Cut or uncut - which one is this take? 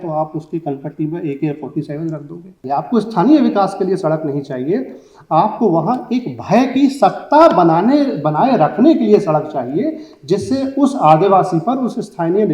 cut